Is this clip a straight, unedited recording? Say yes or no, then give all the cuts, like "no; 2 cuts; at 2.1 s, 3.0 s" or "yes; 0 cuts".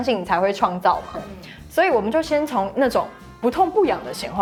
yes; 0 cuts